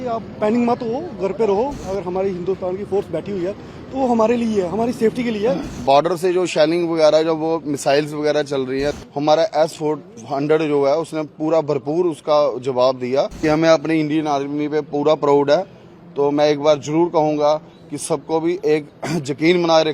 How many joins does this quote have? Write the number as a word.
four